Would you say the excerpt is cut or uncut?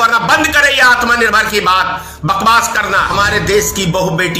cut